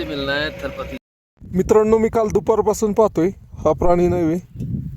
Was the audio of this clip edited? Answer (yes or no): yes